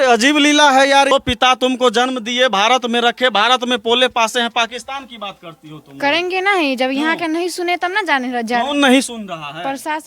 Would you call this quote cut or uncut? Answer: cut